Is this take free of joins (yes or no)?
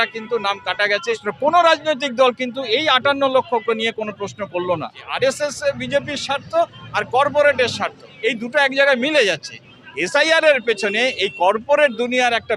no